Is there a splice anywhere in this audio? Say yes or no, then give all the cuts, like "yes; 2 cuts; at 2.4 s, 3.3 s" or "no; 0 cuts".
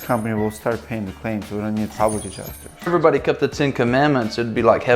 yes; 1 cut; at 2.9 s